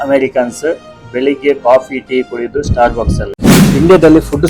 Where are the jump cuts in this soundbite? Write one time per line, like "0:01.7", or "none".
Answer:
0:03.3